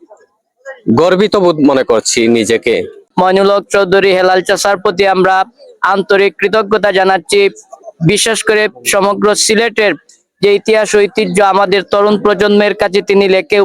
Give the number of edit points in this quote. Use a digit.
1